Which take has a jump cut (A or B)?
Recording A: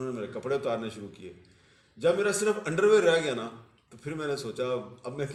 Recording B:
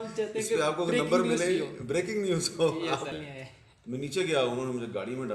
B